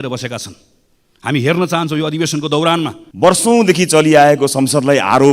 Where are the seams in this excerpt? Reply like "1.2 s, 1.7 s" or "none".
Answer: 3.0 s